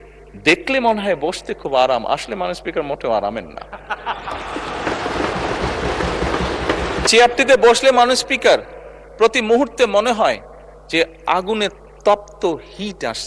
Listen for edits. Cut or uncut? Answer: cut